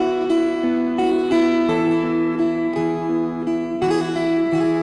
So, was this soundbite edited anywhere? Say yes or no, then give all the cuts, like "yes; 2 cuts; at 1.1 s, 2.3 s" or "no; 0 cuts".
no; 0 cuts